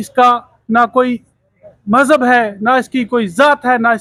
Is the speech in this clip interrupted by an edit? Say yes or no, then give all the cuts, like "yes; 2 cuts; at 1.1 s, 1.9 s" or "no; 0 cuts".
no; 0 cuts